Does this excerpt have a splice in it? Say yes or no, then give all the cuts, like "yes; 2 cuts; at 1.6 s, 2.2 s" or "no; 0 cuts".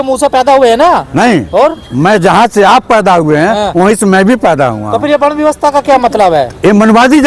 no; 0 cuts